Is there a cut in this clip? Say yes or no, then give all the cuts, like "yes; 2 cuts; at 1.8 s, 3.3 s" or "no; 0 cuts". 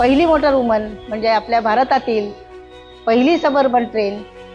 no; 0 cuts